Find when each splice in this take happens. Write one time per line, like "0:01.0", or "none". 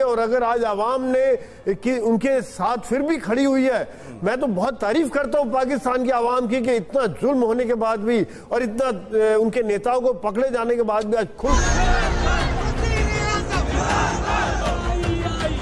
0:11.5